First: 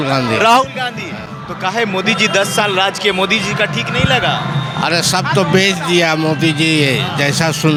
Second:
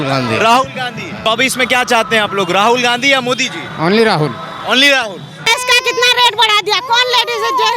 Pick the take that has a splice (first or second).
second